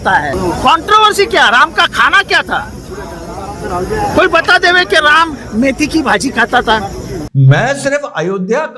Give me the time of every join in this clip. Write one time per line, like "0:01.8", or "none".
0:07.1